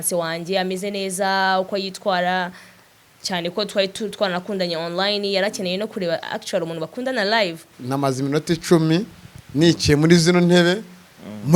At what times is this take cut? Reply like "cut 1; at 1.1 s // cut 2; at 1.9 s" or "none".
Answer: cut 1; at 7.8 s